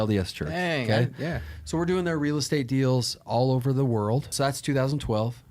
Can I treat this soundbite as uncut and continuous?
no; 1 cut; at 4.3 s

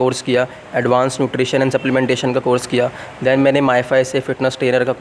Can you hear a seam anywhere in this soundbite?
no; 0 cuts

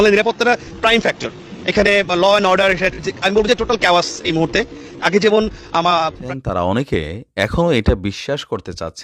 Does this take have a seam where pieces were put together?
yes; 1 cut; at 6.2 s

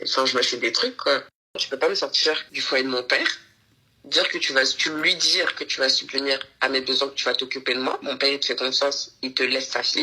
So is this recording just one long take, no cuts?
no; 2 cuts; at 1.5 s, 2.5 s

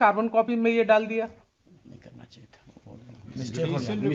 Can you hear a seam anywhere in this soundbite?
yes; 1 cut; at 1.6 s

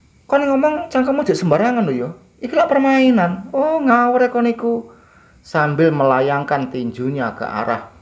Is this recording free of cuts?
yes; 0 cuts

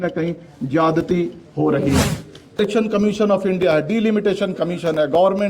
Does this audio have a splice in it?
yes; 1 cut; at 2.6 s

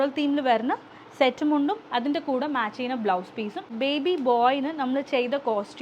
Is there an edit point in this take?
yes; 1 cut; at 3.7 s

